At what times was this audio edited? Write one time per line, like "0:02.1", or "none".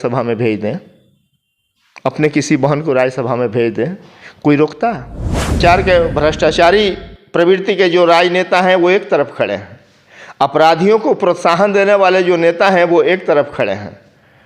0:05.6